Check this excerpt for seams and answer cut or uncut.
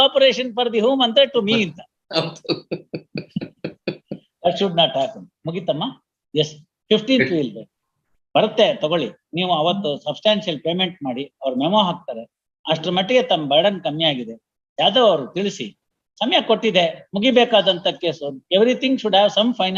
uncut